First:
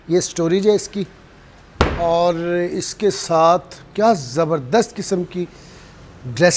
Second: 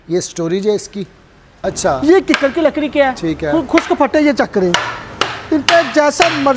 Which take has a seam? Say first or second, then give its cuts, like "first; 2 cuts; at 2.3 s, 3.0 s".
second; 1 cut; at 1.6 s